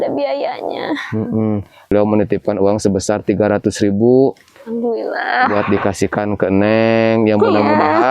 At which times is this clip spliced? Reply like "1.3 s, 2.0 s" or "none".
1.9 s